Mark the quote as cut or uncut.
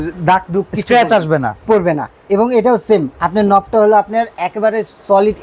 uncut